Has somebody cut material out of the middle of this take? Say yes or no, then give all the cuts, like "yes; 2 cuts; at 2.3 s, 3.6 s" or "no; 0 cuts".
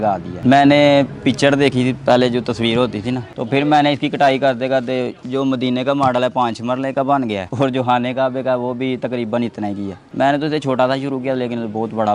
yes; 2 cuts; at 3.3 s, 10.0 s